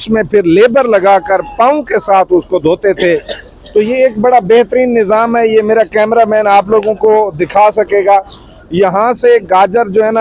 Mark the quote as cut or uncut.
uncut